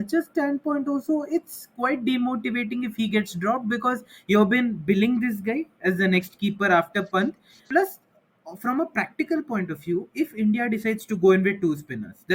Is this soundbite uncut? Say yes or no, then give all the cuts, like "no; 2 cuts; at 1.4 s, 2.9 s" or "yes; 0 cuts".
no; 1 cut; at 7.5 s